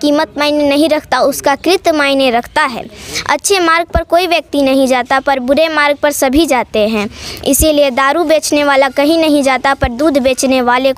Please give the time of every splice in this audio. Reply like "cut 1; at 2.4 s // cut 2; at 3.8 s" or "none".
none

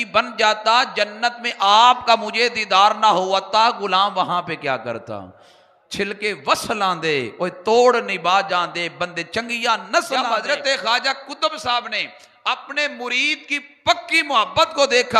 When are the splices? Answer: cut 1; at 10.3 s

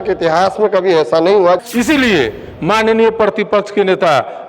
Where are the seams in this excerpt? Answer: cut 1; at 1.7 s

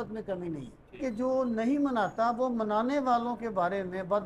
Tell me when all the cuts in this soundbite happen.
cut 1; at 1.0 s

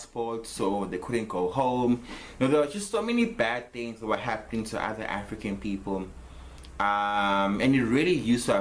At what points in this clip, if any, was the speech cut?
cut 1; at 2.2 s

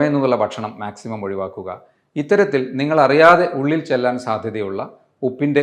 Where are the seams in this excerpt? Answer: none

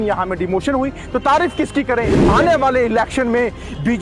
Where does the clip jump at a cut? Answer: cut 1; at 2.2 s

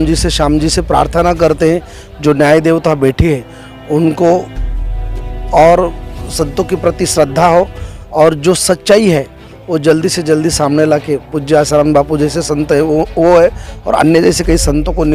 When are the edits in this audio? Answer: none

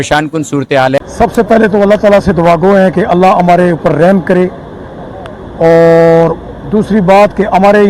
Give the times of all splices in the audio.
cut 1; at 1.0 s

